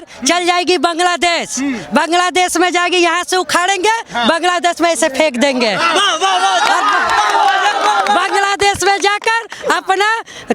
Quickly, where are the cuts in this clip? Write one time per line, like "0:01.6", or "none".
none